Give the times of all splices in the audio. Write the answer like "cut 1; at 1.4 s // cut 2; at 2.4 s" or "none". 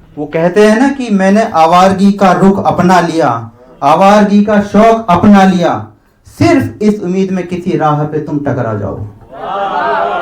none